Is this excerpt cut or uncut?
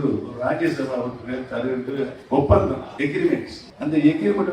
cut